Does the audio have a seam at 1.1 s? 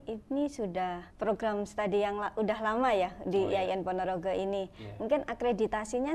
yes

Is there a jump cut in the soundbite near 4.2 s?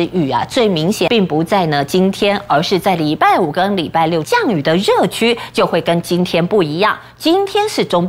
yes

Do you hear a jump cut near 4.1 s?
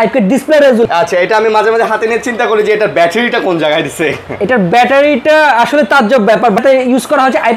no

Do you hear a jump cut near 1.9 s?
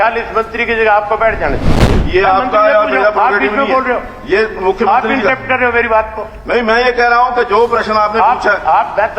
yes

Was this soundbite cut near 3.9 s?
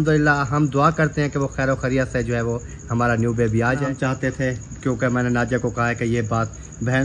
yes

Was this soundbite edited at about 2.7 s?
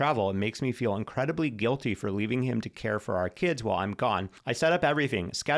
no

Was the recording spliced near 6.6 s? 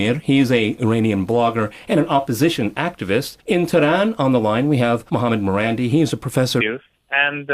no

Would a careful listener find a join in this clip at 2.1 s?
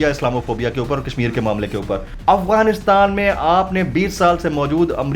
yes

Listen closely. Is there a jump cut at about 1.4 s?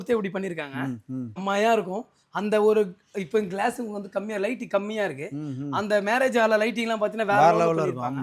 yes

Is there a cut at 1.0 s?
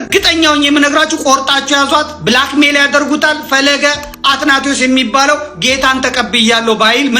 no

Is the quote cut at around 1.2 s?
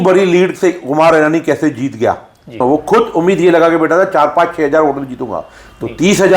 no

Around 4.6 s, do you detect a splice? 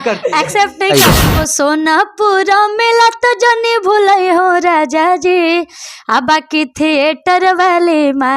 no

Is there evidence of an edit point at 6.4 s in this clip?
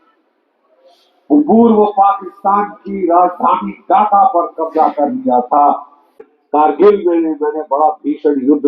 yes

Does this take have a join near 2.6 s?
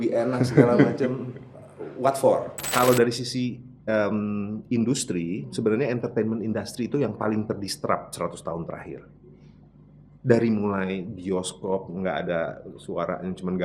yes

